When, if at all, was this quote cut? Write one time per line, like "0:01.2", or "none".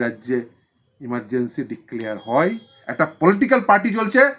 0:02.8